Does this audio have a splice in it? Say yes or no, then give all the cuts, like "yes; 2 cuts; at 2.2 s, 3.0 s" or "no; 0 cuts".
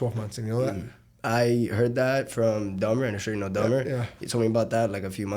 no; 0 cuts